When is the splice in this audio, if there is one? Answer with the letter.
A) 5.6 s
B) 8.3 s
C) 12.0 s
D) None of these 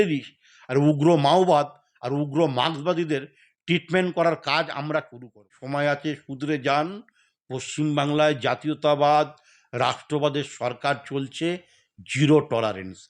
A